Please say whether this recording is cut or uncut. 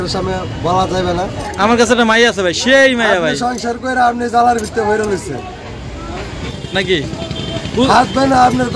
cut